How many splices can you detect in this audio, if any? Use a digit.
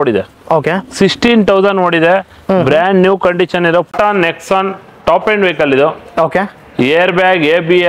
1